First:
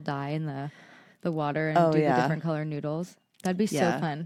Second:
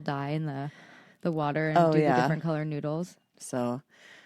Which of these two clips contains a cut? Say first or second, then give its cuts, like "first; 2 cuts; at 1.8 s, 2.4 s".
second; 1 cut; at 3.3 s